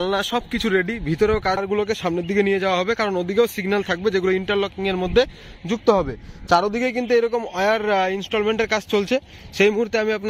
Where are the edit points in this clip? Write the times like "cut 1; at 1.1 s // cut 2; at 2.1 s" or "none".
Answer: cut 1; at 1.6 s